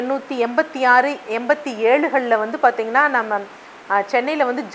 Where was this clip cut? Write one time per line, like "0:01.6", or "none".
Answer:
none

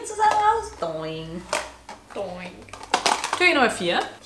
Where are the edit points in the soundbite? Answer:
none

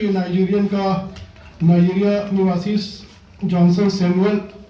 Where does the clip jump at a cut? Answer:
none

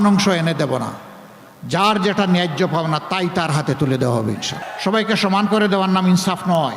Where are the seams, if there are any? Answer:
0:04.6

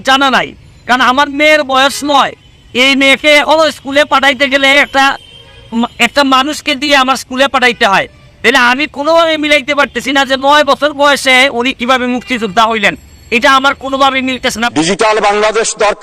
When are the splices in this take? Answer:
0:14.6

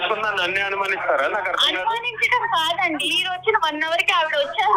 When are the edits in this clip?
0:03.1

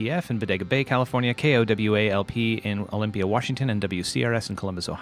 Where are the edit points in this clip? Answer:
none

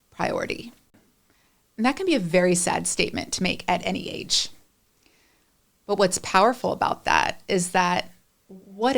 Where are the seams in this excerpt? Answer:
0:00.9

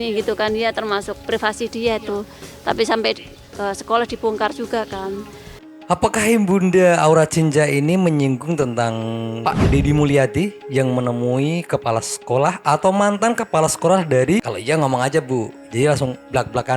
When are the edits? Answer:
0:05.6
0:14.5

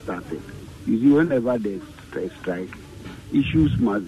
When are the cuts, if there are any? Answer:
none

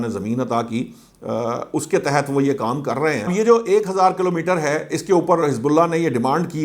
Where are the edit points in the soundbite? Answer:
0:03.3

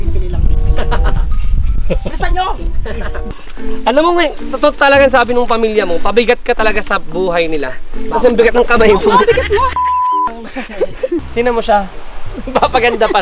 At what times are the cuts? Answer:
0:03.1
0:11.2

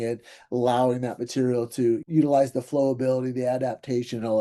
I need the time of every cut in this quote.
0:02.0

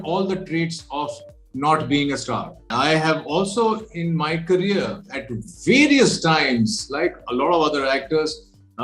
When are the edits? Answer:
0:02.6

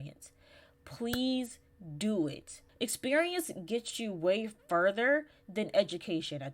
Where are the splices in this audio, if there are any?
0:02.6

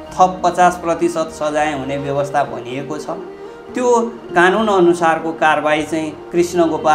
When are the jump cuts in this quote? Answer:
none

